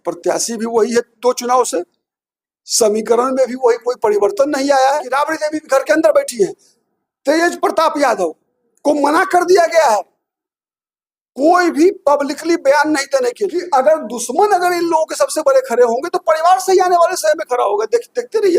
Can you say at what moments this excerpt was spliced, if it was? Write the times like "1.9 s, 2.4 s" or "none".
5.1 s, 13.5 s